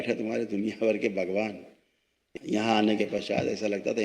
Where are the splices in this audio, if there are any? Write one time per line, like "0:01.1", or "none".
0:02.3